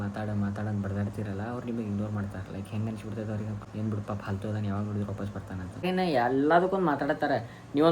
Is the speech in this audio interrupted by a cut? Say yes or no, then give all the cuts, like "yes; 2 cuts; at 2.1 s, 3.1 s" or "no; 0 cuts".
yes; 2 cuts; at 3.6 s, 5.9 s